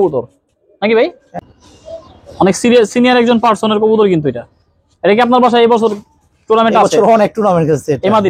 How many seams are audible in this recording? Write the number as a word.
one